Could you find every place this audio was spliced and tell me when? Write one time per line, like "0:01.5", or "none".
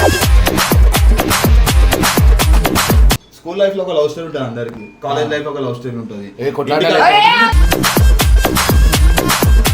0:03.1